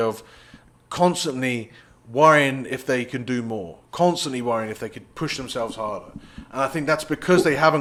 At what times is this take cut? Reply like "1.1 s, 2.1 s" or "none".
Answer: none